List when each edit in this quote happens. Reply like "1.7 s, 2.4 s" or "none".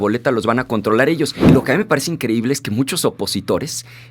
1.5 s